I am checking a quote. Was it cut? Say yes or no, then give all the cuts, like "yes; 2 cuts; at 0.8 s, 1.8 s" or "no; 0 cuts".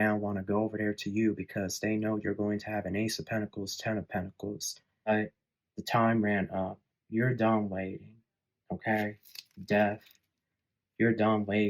yes; 1 cut; at 5.1 s